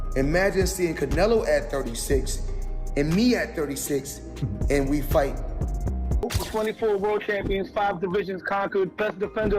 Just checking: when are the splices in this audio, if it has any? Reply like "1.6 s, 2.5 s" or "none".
6.2 s